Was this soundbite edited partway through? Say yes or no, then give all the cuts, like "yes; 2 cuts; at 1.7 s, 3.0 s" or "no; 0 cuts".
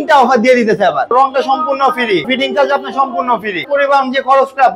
yes; 3 cuts; at 1.1 s, 2.3 s, 3.6 s